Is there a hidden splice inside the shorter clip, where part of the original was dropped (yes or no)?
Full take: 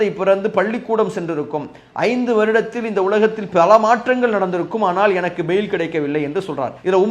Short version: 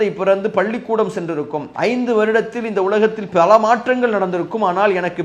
yes